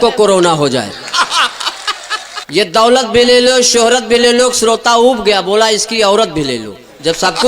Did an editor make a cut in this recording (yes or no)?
yes